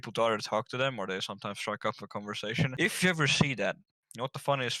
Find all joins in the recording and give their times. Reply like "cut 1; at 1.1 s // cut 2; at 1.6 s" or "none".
cut 1; at 2.7 s